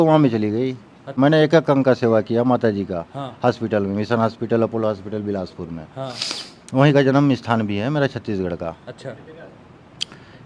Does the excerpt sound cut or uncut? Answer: cut